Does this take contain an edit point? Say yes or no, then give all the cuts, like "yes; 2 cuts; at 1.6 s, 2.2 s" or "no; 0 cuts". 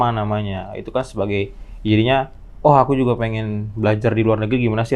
no; 0 cuts